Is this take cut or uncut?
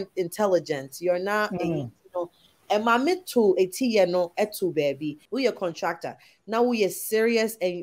cut